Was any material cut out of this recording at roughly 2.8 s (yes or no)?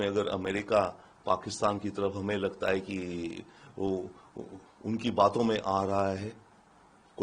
no